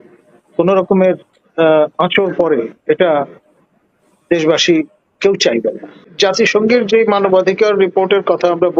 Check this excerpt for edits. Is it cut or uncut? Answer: cut